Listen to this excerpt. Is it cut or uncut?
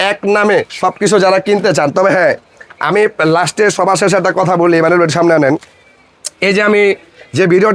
uncut